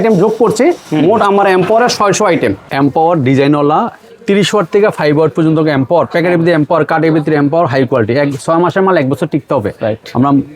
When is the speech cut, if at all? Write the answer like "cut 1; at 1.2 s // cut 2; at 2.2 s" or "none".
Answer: cut 1; at 2.6 s

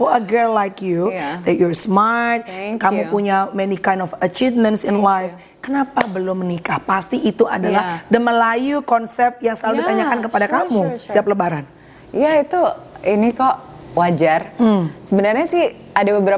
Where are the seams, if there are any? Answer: none

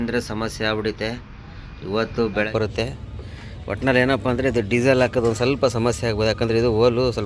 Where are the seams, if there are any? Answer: cut 1; at 2.5 s

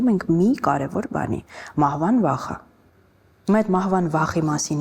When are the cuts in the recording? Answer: none

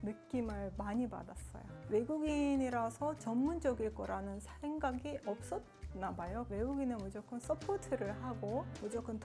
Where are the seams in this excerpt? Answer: none

